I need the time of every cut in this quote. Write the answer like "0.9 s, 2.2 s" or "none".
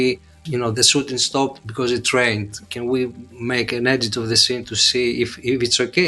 none